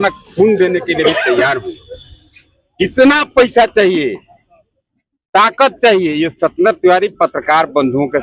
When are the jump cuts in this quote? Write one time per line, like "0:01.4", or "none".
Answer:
none